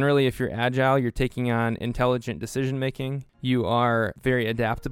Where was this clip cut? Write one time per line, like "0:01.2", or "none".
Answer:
0:03.3
0:04.2